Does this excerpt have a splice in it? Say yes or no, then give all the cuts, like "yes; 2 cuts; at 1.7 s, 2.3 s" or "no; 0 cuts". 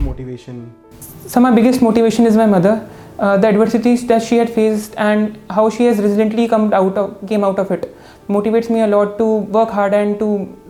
no; 0 cuts